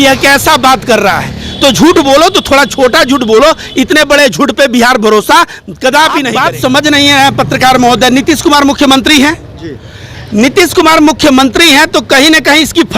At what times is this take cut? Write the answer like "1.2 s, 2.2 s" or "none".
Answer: 6.3 s